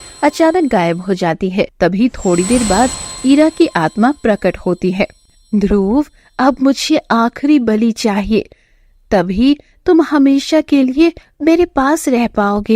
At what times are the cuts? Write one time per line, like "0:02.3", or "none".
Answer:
0:01.7